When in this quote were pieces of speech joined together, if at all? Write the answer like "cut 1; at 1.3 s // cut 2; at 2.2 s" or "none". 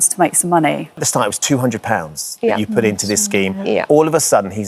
cut 1; at 1.0 s